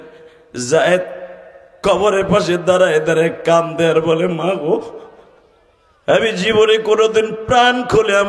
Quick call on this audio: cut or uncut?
uncut